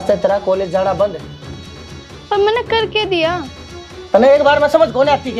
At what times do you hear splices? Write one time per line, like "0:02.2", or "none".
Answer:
none